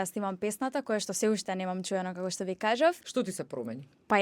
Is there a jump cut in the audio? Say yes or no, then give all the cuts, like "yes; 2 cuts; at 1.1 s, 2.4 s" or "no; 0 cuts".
yes; 1 cut; at 3.0 s